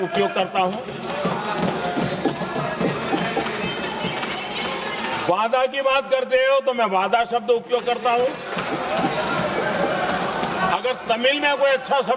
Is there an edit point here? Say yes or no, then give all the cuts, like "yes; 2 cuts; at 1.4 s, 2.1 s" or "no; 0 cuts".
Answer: no; 0 cuts